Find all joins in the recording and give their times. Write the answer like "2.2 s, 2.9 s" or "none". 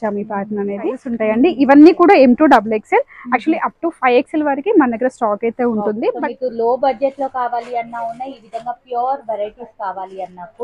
1.1 s, 6.2 s

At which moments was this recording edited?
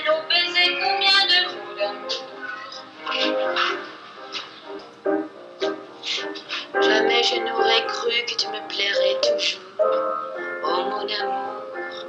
4.9 s

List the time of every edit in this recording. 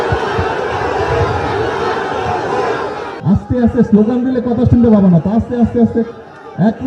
3.0 s

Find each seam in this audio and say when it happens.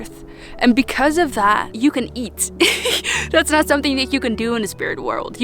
1.7 s

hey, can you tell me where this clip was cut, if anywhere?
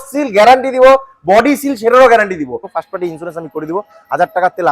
2.6 s

